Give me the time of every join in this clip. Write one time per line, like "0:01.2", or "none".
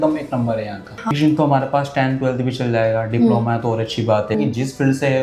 0:01.1
0:04.3